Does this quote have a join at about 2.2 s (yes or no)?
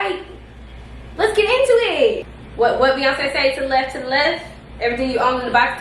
yes